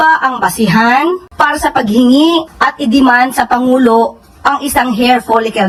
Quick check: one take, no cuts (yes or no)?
yes